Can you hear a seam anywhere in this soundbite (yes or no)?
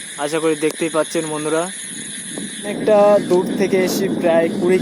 yes